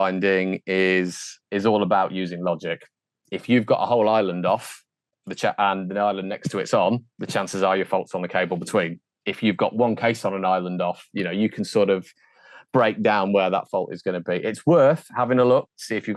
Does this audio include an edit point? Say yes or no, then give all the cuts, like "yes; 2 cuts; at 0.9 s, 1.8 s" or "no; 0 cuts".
no; 0 cuts